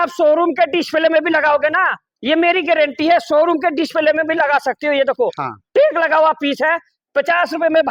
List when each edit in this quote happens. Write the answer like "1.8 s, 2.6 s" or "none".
none